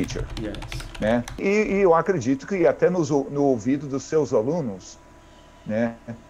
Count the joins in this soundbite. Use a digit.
1